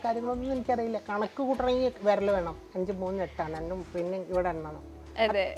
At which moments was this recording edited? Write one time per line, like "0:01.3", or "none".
0:02.6